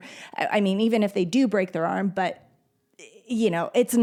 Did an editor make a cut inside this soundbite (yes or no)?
no